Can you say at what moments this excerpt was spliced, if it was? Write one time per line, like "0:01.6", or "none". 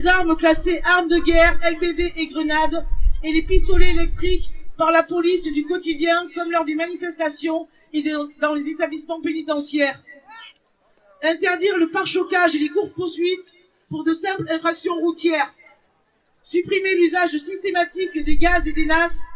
none